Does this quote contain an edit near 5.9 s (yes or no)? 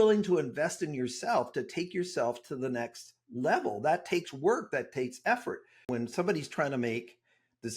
yes